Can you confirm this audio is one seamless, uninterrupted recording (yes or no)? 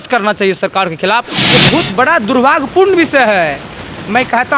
no